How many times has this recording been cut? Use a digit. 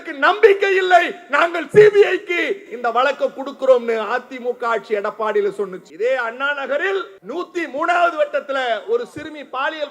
2